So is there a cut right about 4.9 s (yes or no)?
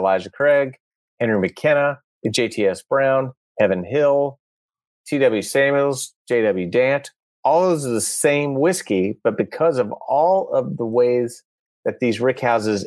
yes